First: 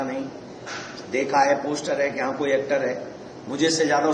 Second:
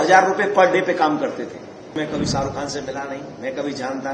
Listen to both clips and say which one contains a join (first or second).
second